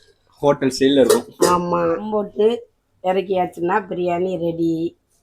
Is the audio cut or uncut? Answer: cut